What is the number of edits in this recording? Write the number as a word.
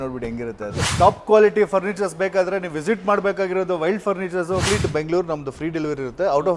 two